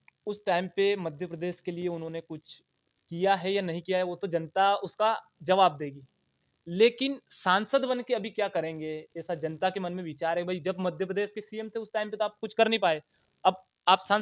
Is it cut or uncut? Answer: uncut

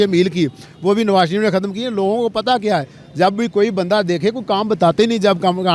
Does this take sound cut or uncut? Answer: uncut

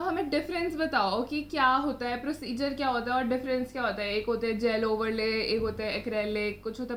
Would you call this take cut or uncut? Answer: uncut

